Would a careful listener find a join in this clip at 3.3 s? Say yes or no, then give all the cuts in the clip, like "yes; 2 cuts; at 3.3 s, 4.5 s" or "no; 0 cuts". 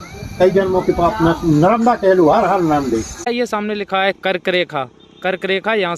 yes; 1 cut; at 3.3 s